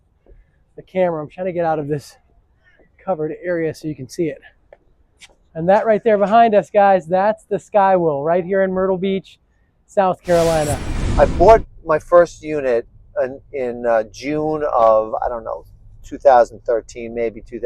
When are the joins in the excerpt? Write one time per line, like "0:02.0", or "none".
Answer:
0:11.0